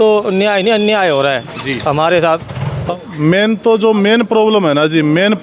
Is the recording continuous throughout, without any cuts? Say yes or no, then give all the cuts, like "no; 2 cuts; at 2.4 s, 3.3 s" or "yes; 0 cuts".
no; 1 cut; at 2.9 s